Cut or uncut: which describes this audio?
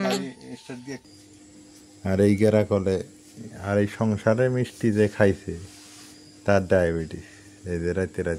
cut